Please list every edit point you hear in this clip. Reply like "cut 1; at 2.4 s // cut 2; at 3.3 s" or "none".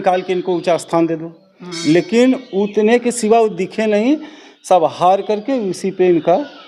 none